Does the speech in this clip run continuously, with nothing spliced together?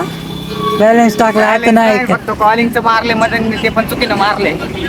yes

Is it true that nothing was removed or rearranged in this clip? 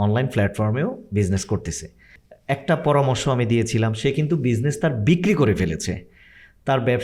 yes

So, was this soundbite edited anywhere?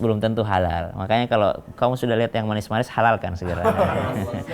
no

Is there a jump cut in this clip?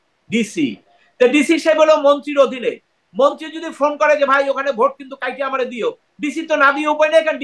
no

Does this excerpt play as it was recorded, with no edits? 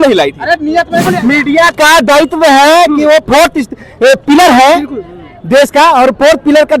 no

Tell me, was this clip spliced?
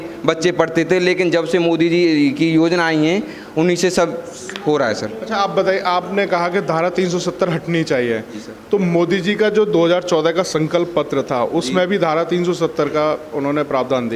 no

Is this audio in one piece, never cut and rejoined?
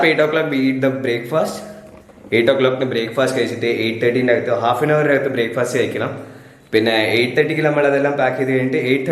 yes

